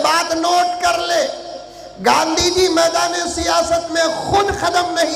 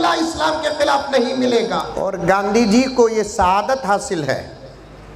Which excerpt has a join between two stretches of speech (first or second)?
second